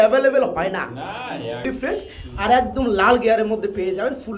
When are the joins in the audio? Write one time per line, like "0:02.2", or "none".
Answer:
0:01.6